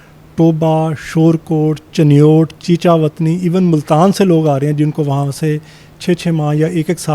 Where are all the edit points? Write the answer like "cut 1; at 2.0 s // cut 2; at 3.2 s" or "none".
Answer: none